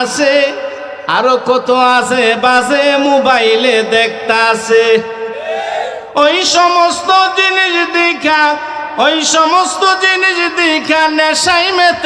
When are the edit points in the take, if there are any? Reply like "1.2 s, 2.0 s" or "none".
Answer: none